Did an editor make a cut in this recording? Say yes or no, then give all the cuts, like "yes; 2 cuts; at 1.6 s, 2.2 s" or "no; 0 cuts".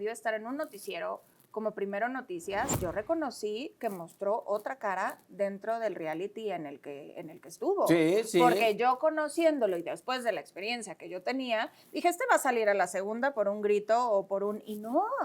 yes; 1 cut; at 2.8 s